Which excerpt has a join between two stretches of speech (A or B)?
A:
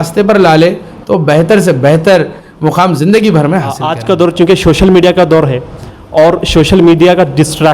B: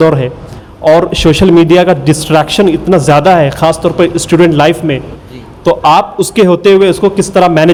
A